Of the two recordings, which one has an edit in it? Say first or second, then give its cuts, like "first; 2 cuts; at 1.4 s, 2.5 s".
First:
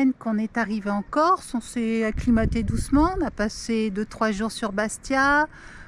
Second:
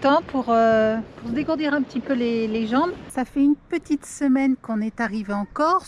second; 1 cut; at 3.0 s